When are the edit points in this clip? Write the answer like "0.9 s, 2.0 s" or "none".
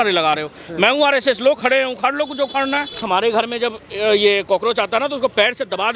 3.1 s